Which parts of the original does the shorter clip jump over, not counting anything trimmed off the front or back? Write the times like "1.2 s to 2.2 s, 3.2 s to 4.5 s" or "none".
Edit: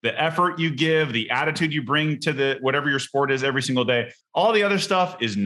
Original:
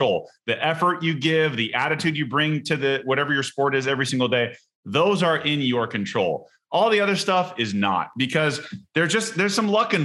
4.6 s to 6.6 s

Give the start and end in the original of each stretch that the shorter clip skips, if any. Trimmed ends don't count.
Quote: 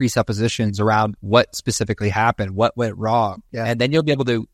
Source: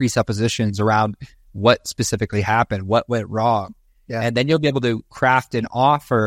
1.2 s to 1.5 s, 3.8 s to 4.0 s

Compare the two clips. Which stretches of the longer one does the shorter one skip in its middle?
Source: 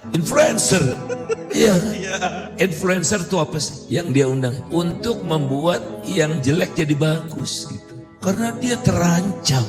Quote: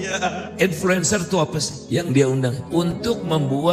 none

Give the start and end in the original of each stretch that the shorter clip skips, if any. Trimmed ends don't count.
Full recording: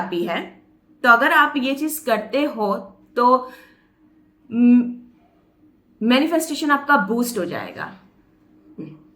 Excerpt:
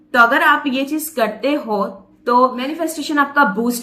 3.6 s to 6.3 s

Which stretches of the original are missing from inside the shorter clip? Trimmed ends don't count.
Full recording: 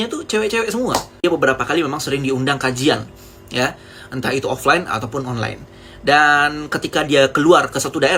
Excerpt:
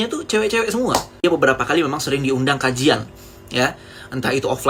none

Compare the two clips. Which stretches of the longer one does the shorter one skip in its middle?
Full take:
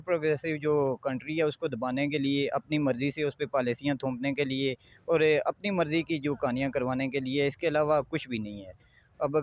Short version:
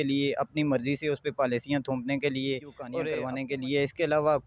5.2 s to 6.7 s

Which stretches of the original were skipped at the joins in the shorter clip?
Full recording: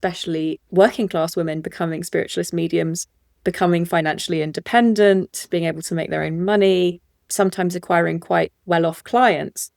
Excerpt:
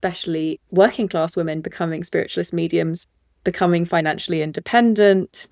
none

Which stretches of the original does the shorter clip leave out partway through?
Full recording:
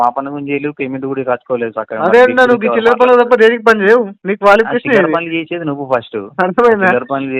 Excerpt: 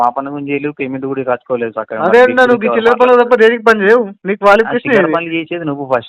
none

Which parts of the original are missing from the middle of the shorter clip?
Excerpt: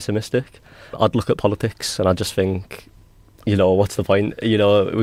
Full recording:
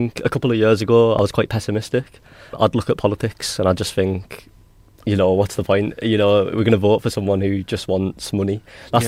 none

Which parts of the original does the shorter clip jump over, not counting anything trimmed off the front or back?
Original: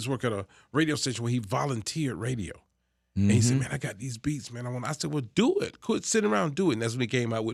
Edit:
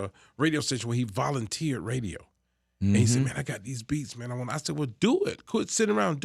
none

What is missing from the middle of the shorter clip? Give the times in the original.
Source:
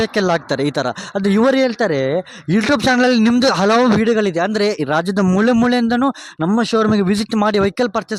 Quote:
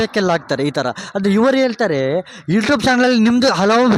none

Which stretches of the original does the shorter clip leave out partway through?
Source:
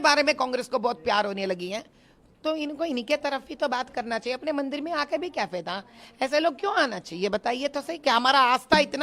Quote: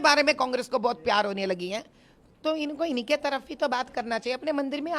none

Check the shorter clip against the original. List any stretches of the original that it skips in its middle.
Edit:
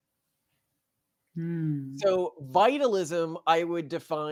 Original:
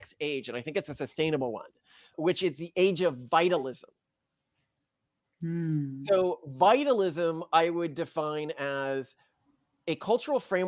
none

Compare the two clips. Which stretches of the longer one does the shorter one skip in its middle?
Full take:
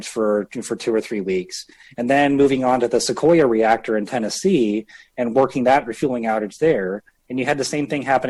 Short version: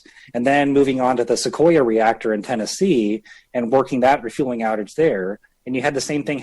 none

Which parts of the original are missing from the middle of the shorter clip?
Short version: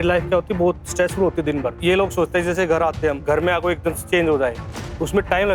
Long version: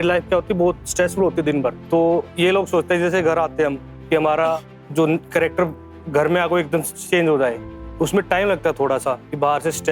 1.8 s to 2.3 s, 3.8 s to 6.1 s, 6.9 s to 7.0 s

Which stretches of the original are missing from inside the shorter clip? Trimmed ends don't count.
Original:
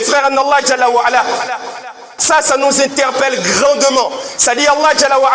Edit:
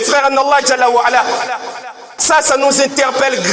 none

